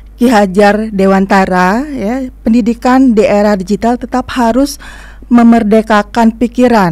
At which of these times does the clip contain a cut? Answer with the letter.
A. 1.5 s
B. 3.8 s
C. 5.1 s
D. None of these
D